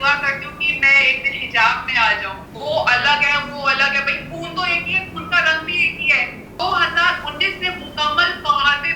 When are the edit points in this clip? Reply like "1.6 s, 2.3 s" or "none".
2.4 s, 6.6 s